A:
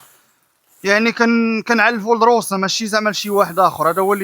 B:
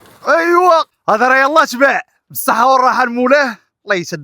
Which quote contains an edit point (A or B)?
B